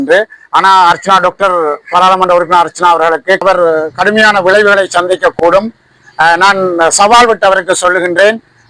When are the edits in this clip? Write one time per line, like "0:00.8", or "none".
0:03.4